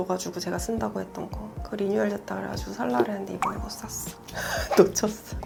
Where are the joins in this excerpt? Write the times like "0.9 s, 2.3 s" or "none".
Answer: none